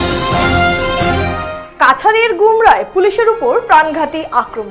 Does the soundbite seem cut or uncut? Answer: cut